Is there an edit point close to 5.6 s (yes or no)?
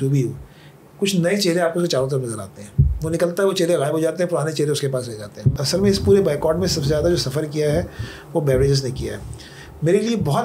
yes